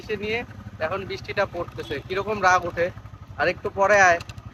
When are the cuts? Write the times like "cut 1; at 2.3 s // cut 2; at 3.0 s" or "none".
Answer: none